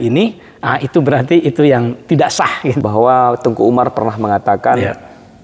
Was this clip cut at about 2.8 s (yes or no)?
yes